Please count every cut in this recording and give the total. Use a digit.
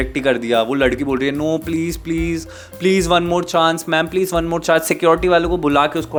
0